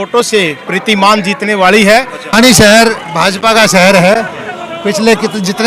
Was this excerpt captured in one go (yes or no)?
no